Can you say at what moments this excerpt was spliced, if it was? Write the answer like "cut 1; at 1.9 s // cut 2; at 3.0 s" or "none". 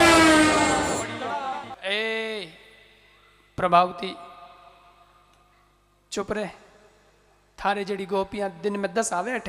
cut 1; at 1.8 s

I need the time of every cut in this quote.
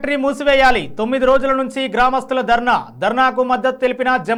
none

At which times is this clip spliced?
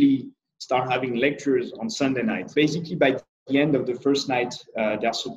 cut 1; at 2.5 s

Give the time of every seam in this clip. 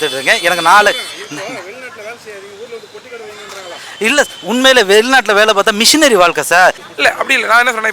cut 1; at 6.9 s

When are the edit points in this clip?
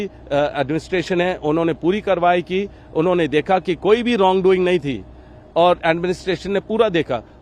none

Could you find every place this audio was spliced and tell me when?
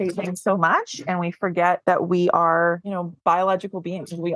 cut 1; at 1.8 s // cut 2; at 2.9 s

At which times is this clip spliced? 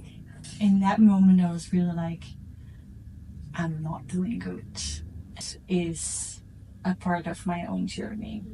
cut 1; at 5.3 s

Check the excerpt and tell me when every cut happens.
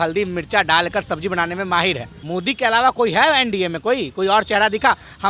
cut 1; at 2.1 s

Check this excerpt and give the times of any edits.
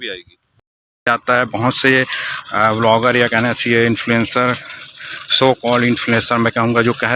cut 1; at 1.1 s

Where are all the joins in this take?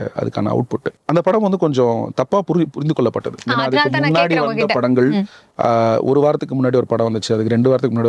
cut 1; at 1.0 s

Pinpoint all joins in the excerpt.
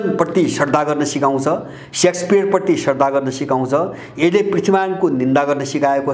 none

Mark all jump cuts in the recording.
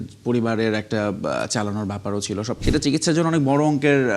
cut 1; at 2.5 s

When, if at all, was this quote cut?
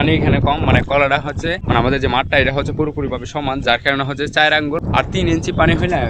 cut 1; at 1.6 s // cut 2; at 4.8 s

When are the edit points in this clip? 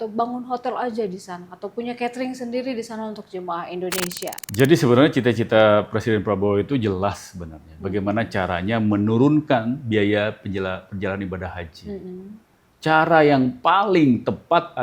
cut 1; at 4.4 s

